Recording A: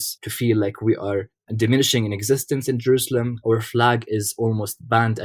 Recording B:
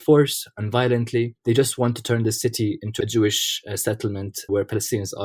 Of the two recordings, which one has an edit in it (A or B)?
B